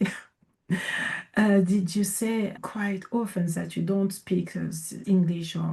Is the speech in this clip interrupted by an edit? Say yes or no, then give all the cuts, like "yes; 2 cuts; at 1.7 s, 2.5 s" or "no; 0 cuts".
no; 0 cuts